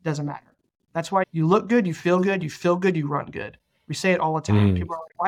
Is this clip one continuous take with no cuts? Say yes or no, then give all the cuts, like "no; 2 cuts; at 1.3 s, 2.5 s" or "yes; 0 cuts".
no; 1 cut; at 1.3 s